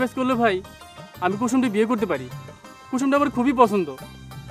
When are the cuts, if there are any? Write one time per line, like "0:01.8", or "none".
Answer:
none